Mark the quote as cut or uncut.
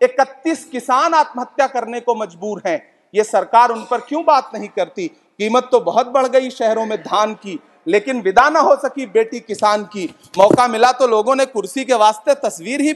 uncut